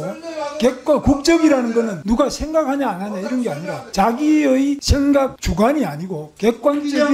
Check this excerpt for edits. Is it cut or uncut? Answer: cut